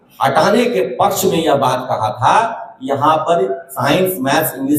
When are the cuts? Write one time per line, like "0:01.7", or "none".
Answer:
none